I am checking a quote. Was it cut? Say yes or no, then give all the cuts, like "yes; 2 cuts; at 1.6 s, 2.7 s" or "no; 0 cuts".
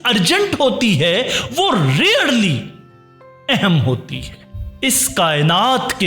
yes; 1 cut; at 4.4 s